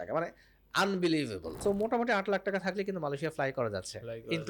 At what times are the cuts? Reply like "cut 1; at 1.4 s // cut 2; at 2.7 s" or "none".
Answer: cut 1; at 1.6 s